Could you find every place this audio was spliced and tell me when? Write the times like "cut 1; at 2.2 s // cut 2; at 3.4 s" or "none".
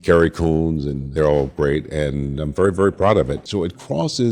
cut 1; at 1.0 s // cut 2; at 3.4 s